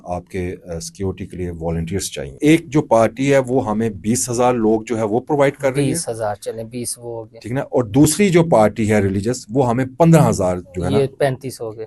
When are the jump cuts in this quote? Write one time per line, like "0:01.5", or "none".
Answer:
0:02.3